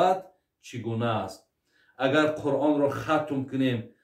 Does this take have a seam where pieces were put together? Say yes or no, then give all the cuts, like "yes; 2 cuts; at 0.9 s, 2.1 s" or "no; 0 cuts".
no; 0 cuts